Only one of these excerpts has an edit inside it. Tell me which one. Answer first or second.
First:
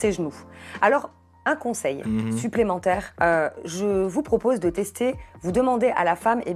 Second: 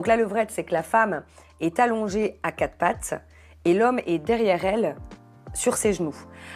first